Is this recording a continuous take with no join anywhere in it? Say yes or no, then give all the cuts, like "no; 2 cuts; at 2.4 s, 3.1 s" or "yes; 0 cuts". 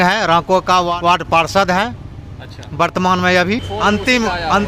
no; 2 cuts; at 0.9 s, 3.7 s